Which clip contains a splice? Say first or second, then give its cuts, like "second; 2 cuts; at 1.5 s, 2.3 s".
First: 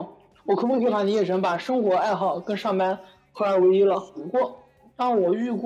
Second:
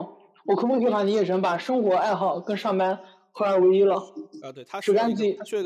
first; 1 cut; at 4.2 s